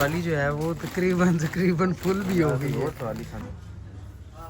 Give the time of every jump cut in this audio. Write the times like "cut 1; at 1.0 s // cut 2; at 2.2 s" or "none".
cut 1; at 3.4 s